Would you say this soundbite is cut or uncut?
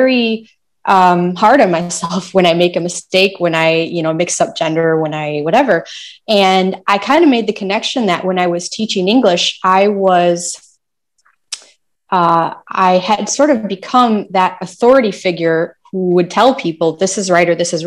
uncut